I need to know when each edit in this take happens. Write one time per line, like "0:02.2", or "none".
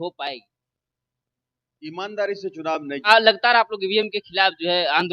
0:03.0

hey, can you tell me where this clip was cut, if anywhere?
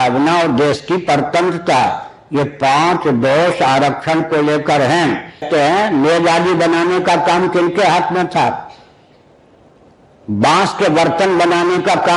0:05.5

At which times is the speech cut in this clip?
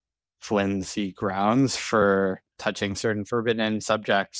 0:02.6

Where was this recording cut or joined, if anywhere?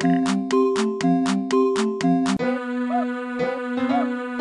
0:02.4

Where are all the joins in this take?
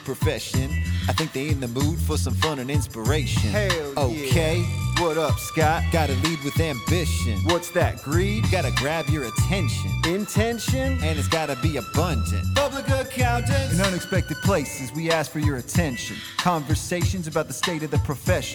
none

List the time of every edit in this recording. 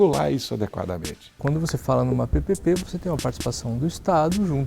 0:01.4
0:02.8

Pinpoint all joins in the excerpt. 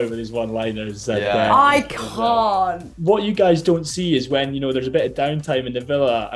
0:02.9

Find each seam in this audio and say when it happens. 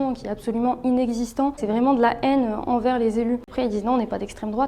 0:01.6
0:03.5

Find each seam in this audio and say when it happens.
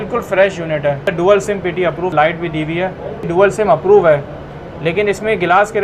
0:01.1
0:02.1
0:03.3

